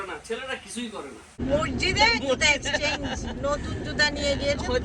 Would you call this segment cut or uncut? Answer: cut